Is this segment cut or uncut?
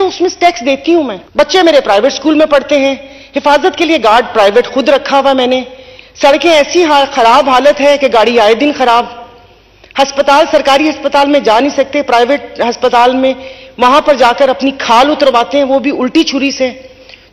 cut